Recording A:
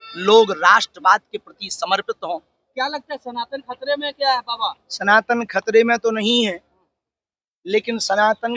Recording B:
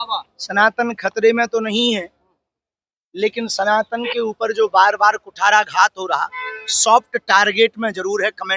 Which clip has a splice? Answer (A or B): A